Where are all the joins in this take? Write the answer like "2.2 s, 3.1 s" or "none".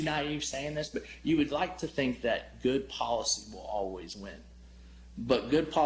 none

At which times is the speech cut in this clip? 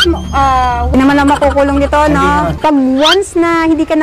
0.9 s, 2.5 s

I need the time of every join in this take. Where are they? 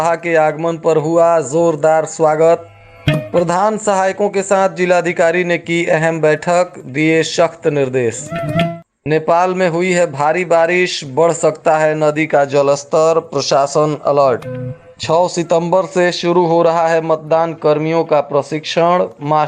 none

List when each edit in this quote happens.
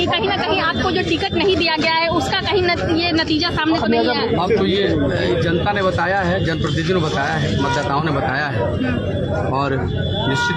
none

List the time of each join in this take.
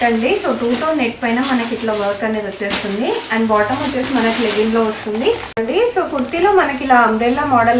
5.5 s

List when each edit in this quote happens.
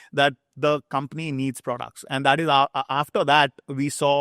none

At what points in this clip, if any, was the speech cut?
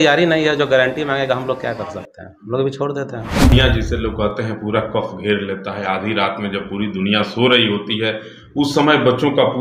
3.5 s

